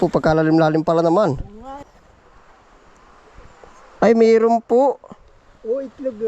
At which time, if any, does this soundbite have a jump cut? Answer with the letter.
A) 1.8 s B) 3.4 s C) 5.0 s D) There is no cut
A